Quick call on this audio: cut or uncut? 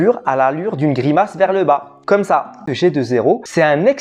cut